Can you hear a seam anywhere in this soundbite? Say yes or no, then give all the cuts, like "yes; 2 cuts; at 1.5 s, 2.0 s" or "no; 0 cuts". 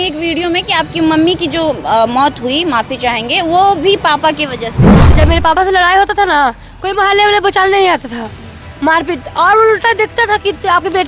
yes; 1 cut; at 5.0 s